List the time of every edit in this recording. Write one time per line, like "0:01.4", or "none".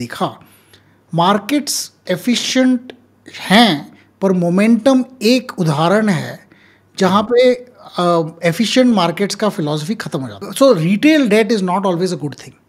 0:10.4